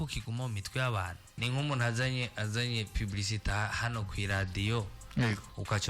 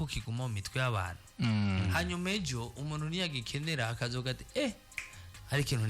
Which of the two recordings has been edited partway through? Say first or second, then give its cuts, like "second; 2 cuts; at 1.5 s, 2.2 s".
first; 1 cut; at 1.3 s